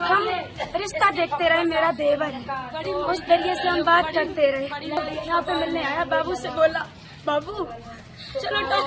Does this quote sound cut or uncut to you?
cut